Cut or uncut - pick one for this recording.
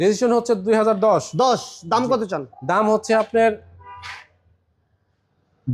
uncut